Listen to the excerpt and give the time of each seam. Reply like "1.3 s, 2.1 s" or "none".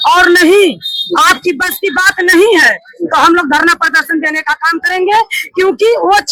none